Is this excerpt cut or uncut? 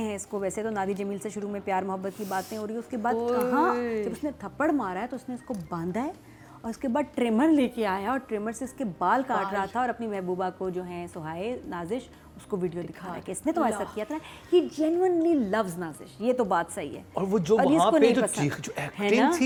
uncut